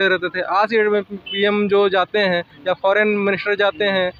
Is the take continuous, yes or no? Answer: yes